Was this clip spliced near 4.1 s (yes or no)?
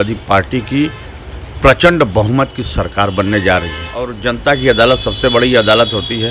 yes